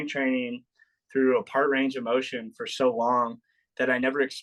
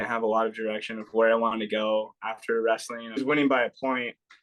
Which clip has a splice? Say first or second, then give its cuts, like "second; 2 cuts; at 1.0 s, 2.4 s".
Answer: second; 1 cut; at 3.2 s